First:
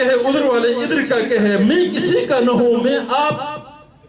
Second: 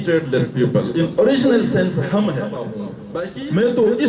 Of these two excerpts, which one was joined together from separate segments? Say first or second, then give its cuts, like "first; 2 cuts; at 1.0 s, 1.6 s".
second; 1 cut; at 3.0 s